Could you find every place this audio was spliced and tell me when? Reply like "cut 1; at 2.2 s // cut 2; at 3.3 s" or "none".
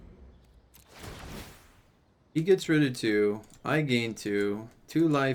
none